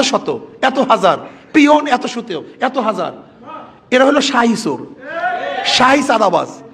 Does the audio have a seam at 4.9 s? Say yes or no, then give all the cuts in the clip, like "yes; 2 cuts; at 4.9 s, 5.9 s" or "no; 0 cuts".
no; 0 cuts